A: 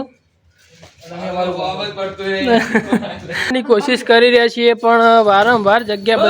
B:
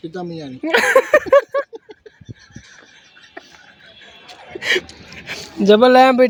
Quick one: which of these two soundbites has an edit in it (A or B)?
A